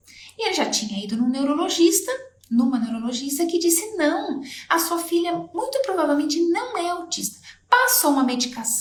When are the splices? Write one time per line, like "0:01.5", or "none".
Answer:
none